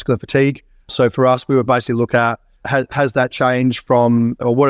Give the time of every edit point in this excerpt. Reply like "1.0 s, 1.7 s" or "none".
0.9 s

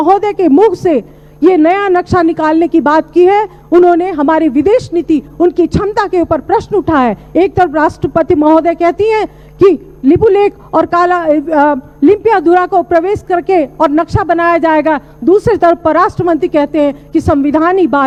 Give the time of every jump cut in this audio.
none

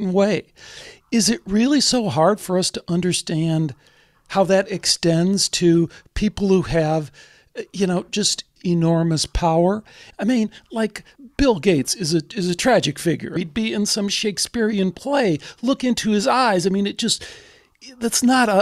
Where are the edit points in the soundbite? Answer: 8.5 s, 10.1 s, 11.1 s, 13.4 s

